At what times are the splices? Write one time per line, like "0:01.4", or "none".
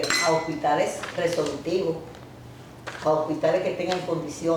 none